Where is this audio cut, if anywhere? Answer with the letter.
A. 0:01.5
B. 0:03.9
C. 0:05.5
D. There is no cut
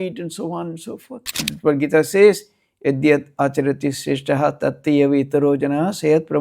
A